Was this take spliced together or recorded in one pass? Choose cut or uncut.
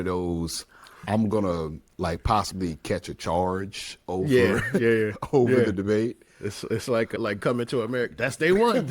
cut